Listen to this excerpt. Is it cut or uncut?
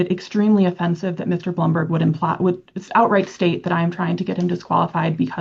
uncut